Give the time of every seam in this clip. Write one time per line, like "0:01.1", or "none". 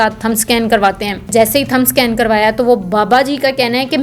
0:01.3